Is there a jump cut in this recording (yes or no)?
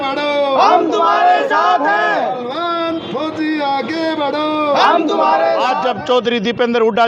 yes